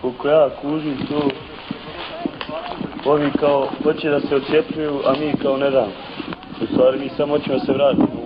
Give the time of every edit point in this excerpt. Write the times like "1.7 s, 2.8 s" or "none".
4.5 s

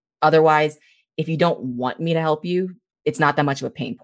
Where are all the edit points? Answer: 2.8 s

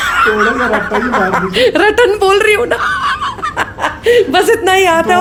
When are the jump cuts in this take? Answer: none

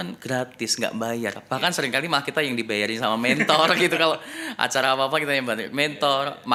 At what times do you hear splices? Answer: none

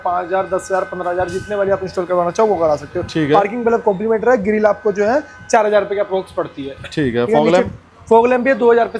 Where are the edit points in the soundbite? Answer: none

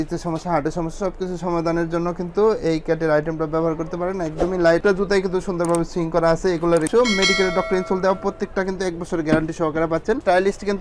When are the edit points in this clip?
4.8 s, 6.9 s, 10.1 s

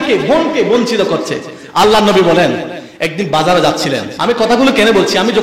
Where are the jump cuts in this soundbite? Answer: 4.1 s

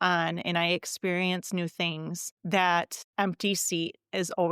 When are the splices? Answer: 2.3 s, 3.0 s

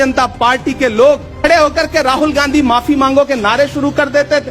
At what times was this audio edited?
1.3 s

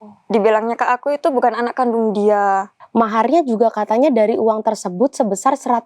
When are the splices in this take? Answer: 2.8 s

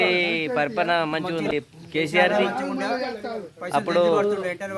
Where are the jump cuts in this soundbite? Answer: 1.5 s

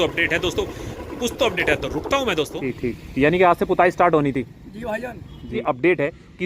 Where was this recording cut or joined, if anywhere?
2.6 s, 5.6 s

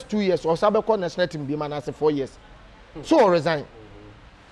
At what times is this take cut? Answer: none

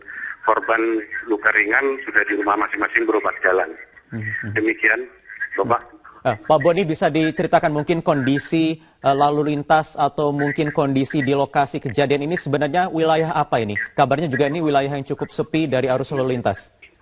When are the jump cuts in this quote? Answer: none

